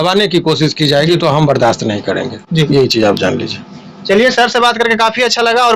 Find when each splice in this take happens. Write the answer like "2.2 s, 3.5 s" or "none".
none